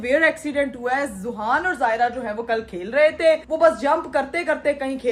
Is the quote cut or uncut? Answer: uncut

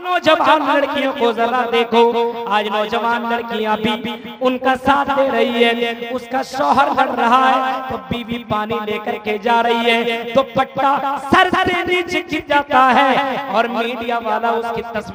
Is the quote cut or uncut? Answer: uncut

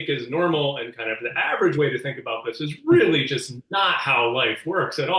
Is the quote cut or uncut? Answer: uncut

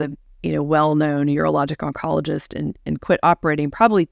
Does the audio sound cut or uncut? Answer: uncut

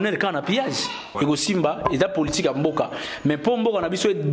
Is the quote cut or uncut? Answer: cut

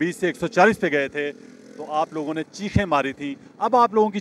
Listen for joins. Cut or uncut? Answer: uncut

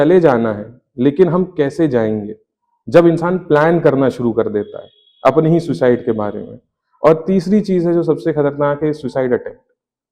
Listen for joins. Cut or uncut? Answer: uncut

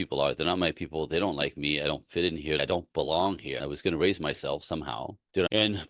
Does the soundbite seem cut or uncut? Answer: cut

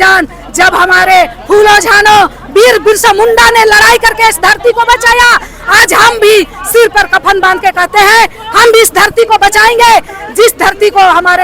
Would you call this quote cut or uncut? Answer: uncut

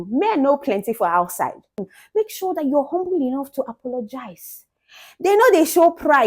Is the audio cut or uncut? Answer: cut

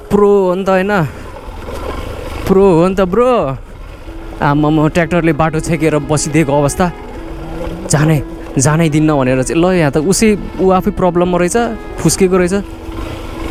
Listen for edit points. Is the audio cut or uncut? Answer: uncut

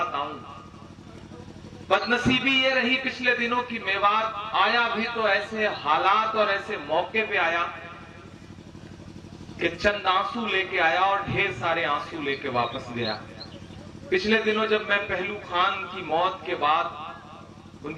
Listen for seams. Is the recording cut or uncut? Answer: uncut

